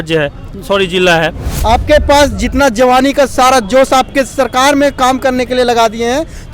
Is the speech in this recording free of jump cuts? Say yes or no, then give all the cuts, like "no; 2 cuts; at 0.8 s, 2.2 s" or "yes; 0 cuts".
no; 1 cut; at 1.5 s